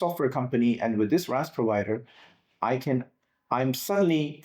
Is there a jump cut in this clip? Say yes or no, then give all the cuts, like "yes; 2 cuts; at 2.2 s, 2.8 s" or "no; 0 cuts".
no; 0 cuts